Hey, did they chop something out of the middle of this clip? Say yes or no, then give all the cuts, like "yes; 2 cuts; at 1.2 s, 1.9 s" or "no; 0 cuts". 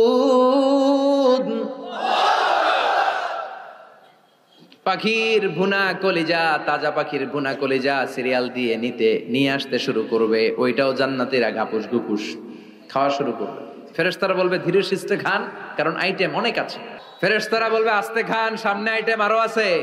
no; 0 cuts